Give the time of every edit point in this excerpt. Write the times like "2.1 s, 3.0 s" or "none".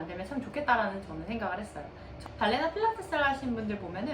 2.2 s